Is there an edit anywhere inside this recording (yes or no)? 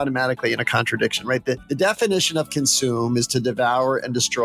yes